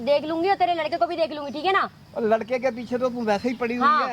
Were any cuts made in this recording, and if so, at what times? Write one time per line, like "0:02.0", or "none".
none